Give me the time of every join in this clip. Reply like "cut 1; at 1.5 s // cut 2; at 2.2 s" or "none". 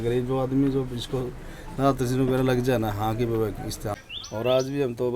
cut 1; at 4.0 s